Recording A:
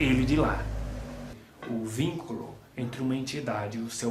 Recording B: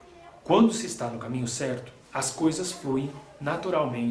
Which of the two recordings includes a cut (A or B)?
A